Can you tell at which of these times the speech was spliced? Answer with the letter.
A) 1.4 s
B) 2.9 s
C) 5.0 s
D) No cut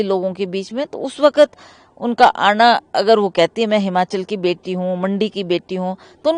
D